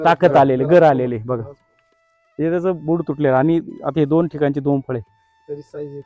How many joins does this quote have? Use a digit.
0